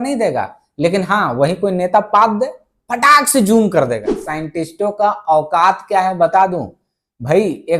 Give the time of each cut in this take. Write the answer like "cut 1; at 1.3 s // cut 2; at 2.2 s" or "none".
cut 1; at 4.2 s